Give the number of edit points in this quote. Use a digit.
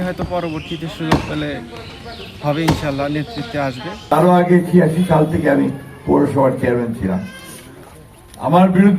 1